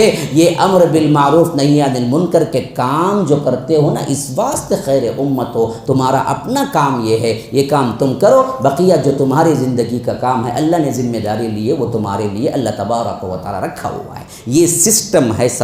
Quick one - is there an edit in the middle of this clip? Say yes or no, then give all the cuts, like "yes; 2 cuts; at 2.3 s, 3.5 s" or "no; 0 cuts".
no; 0 cuts